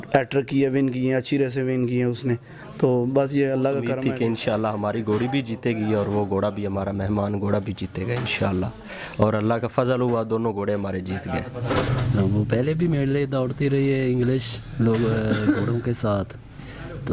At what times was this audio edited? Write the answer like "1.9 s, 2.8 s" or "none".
4.0 s, 12.0 s